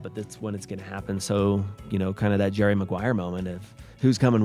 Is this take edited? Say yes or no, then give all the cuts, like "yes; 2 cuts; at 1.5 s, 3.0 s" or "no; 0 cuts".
no; 0 cuts